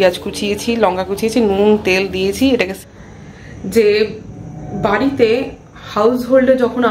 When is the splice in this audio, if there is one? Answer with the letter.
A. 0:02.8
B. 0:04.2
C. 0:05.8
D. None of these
A